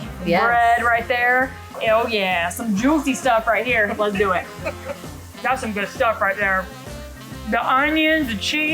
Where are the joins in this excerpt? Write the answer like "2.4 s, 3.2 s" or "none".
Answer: 1.7 s, 5.2 s